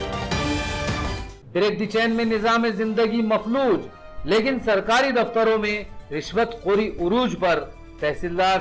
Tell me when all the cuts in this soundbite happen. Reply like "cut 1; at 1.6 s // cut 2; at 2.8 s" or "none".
cut 1; at 1.0 s